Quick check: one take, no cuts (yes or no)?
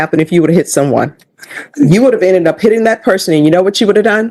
yes